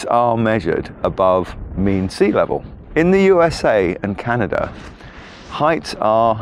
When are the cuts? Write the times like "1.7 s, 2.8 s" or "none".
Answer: 2.8 s